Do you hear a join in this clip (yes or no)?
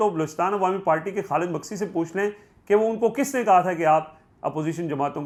no